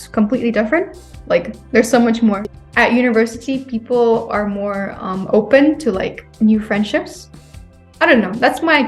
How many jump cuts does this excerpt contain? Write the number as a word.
one